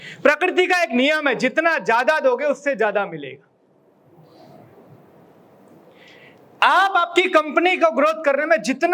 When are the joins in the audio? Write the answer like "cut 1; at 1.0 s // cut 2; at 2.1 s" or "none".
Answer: none